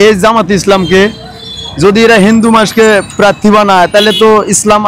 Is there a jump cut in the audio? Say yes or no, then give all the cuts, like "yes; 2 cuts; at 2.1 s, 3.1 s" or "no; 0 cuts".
no; 0 cuts